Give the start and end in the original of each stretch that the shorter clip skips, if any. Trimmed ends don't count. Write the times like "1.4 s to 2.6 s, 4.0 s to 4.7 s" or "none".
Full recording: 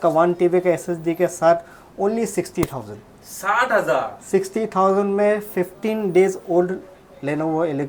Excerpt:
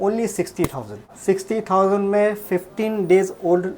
3.1 s to 4.2 s